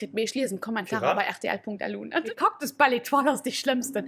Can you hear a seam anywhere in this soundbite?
yes; 1 cut; at 2.2 s

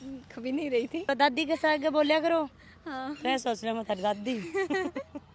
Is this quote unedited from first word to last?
no; 1 cut; at 1.1 s

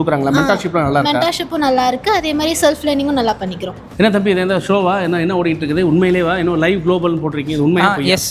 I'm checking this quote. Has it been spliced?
yes; 1 cut; at 3.8 s

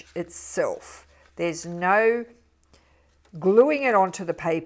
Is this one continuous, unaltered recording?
yes; 0 cuts

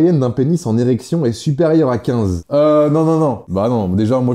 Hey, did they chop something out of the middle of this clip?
yes; 2 cuts; at 2.4 s, 3.4 s

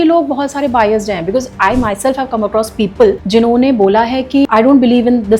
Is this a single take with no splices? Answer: no; 2 cuts; at 3.2 s, 4.4 s

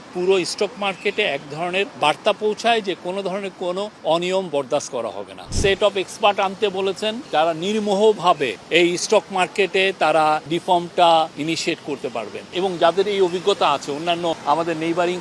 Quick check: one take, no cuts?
no; 9 cuts; at 1.9 s, 3.9 s, 5.5 s, 7.3 s, 8.5 s, 10.5 s, 11.3 s, 12.5 s, 14.4 s

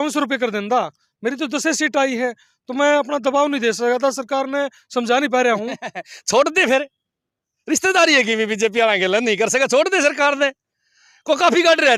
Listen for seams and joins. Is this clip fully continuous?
yes; 0 cuts

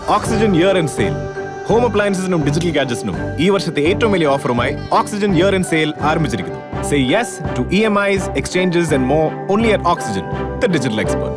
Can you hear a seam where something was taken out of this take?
no; 0 cuts

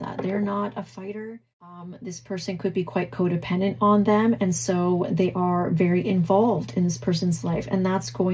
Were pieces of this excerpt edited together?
yes; 1 cut; at 1.9 s

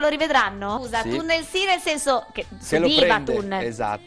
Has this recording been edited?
yes; 1 cut; at 1.4 s

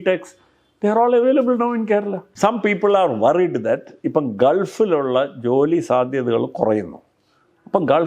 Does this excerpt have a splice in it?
yes; 1 cut; at 2.2 s

